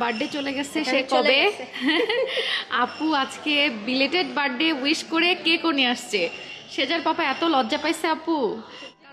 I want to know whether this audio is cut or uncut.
uncut